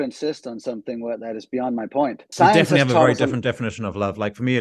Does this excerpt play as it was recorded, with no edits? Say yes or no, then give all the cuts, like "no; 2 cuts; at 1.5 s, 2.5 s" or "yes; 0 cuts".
no; 1 cut; at 2.2 s